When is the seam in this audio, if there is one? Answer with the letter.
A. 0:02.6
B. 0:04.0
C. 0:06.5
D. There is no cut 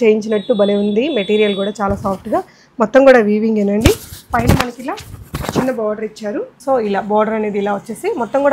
C